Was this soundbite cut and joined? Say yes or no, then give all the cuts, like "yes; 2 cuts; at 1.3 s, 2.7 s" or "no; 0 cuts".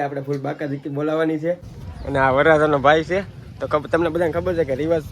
yes; 1 cut; at 1.7 s